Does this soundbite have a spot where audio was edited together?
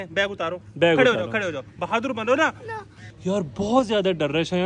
yes; 1 cut; at 3.0 s

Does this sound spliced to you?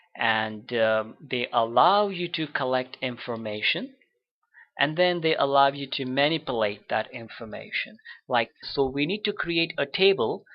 no; 0 cuts

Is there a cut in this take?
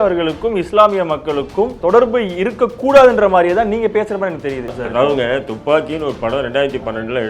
yes; 2 cuts; at 1.8 s, 4.8 s

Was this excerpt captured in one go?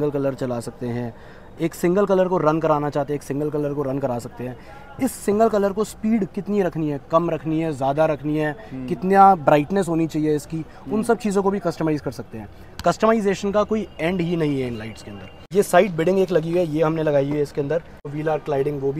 no; 2 cuts; at 15.4 s, 18.2 s

